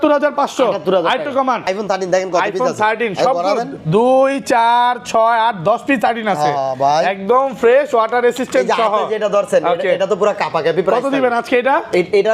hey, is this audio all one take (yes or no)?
no